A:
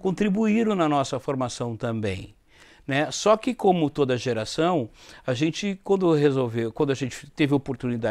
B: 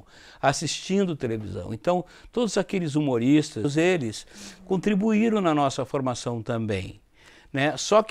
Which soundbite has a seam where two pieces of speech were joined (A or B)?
B